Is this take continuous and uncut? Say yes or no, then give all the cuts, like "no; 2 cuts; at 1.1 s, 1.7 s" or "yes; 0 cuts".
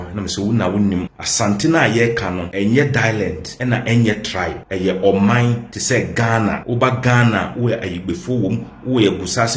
no; 6 cuts; at 1.2 s, 2.5 s, 3.5 s, 4.6 s, 5.7 s, 6.6 s